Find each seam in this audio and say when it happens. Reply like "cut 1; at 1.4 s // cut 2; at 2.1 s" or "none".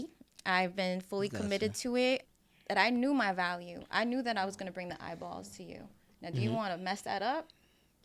cut 1; at 2.3 s